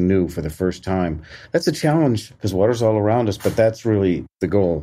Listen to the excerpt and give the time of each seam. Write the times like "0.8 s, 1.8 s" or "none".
2.3 s, 3.9 s